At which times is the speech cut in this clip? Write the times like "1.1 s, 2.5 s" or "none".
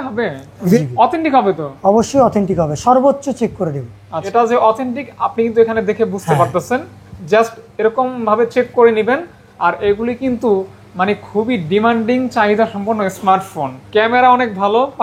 0.8 s, 4.1 s, 13.7 s